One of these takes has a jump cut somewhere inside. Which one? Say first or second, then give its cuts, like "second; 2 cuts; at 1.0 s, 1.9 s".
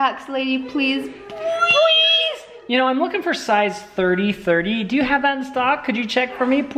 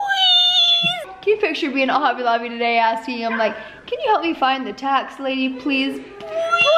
second; 1 cut; at 1.0 s